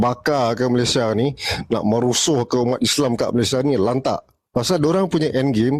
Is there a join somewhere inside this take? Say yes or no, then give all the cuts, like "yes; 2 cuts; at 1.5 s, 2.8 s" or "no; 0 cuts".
no; 0 cuts